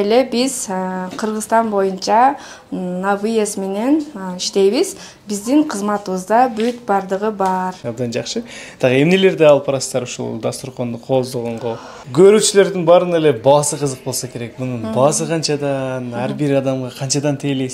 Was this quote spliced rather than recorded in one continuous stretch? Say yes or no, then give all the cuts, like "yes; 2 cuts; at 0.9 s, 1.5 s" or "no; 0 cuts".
yes; 2 cuts; at 7.8 s, 12.0 s